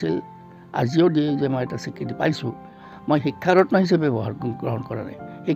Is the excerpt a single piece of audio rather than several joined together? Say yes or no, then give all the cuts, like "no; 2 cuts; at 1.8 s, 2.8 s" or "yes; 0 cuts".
no; 1 cut; at 2.9 s